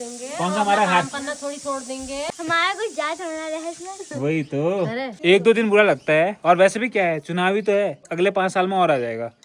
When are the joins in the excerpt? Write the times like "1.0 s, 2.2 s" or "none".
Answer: none